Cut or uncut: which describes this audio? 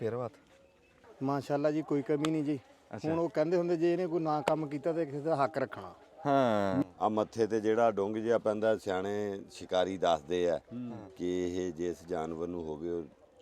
cut